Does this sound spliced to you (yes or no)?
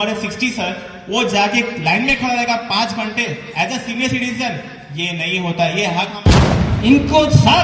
yes